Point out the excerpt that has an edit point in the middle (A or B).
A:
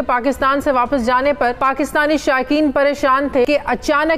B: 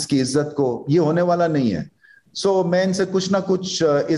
A